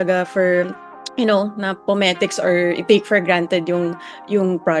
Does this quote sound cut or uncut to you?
uncut